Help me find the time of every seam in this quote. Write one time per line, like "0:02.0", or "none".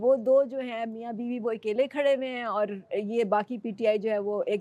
none